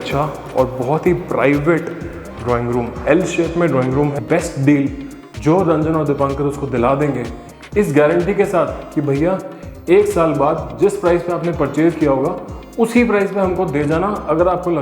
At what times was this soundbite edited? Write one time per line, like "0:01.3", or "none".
0:04.2